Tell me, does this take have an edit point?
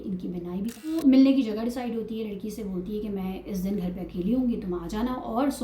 yes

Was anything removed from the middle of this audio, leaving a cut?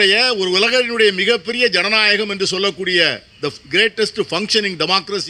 no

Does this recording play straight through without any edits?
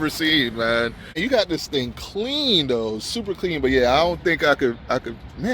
no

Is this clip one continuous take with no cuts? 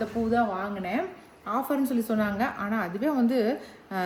yes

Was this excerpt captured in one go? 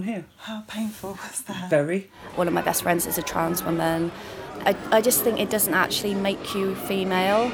no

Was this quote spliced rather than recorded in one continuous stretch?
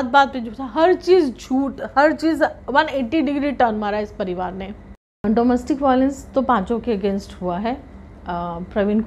yes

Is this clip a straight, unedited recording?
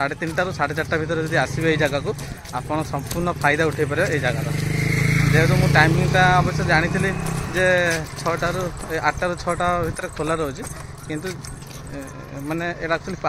yes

